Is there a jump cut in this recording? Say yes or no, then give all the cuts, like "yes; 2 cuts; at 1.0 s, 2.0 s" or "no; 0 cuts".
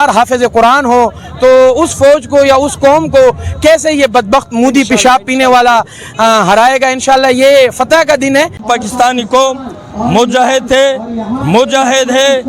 yes; 1 cut; at 8.6 s